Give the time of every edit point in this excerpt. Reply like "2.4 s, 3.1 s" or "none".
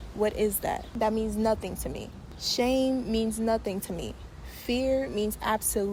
none